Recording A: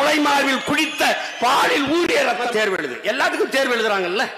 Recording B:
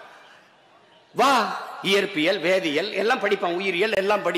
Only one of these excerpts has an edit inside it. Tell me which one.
A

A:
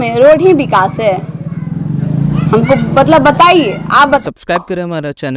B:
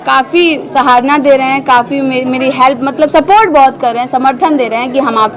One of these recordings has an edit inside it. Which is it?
A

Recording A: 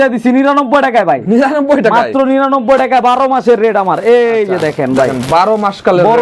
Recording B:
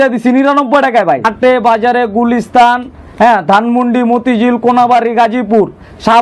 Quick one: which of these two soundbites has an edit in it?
B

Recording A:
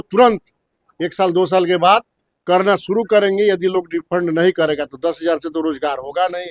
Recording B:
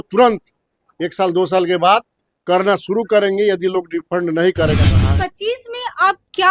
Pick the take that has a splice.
B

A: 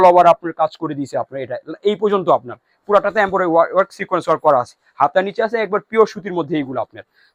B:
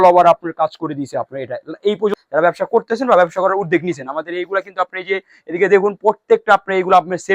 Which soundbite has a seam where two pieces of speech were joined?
B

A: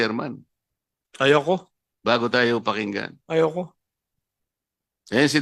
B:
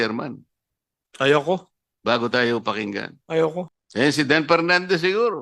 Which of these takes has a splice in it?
B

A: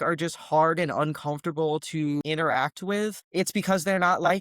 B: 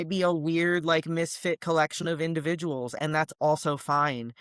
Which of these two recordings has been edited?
A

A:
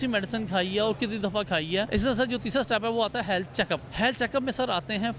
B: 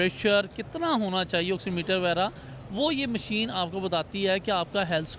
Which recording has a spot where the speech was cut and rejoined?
A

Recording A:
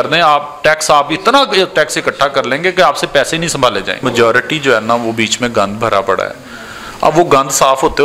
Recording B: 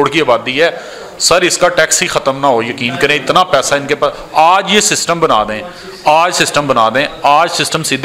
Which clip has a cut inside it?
A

